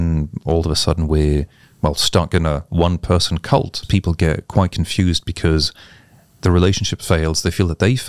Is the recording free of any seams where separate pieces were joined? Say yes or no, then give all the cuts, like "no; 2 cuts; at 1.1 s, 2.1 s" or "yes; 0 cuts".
no; 1 cut; at 3.8 s